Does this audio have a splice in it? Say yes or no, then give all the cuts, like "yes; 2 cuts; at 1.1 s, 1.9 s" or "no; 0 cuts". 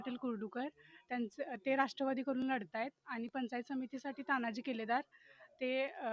no; 0 cuts